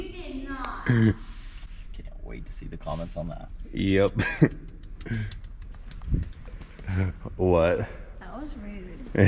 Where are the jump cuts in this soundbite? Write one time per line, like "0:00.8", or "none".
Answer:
none